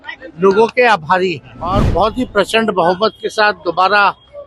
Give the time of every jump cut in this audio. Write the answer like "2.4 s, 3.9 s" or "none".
1.8 s